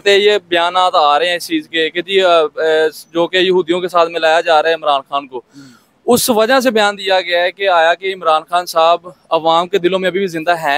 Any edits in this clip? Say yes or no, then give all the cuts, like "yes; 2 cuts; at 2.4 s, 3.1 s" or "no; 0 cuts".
no; 0 cuts